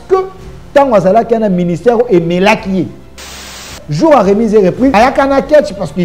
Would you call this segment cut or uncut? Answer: cut